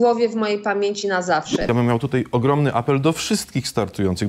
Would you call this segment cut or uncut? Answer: cut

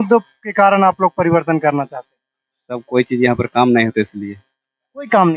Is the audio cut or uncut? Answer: uncut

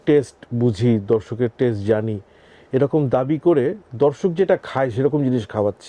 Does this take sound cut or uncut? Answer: uncut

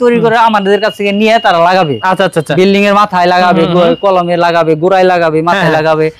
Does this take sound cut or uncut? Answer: uncut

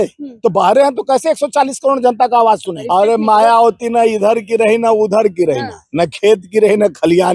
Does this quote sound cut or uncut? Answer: cut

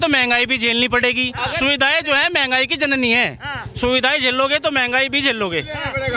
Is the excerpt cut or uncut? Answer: uncut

